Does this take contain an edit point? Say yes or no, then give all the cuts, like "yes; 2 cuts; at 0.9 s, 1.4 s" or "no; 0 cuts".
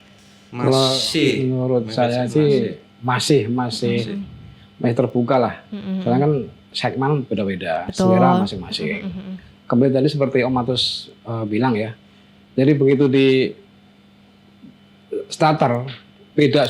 no; 0 cuts